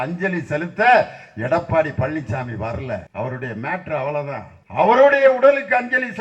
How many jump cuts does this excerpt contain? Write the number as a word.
two